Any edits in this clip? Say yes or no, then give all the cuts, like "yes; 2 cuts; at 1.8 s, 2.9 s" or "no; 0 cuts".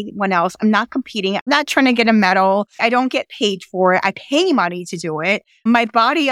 yes; 1 cut; at 1.4 s